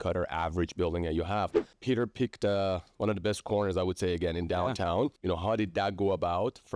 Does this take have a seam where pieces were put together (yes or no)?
yes